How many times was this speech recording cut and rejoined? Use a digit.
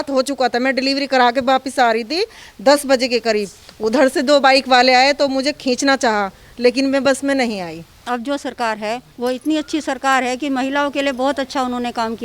1